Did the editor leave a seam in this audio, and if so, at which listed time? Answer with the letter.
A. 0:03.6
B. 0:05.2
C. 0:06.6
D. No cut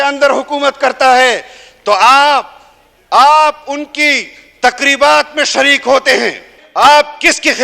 C